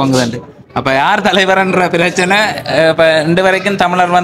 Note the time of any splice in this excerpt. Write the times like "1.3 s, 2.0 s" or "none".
none